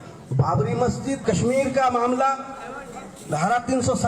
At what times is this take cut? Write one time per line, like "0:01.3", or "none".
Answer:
0:01.2